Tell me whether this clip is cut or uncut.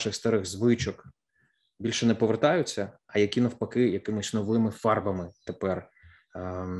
uncut